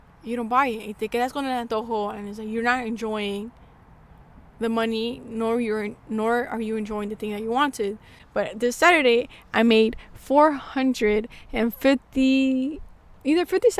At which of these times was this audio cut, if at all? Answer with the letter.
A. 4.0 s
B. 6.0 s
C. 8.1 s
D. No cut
C